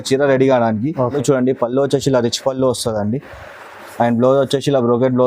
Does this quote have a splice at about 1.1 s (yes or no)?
yes